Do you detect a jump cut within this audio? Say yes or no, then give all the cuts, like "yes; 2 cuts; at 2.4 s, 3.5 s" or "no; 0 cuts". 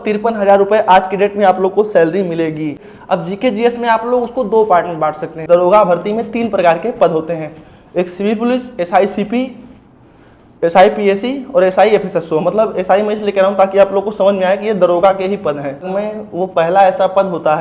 yes; 3 cuts; at 2.9 s, 5.4 s, 15.9 s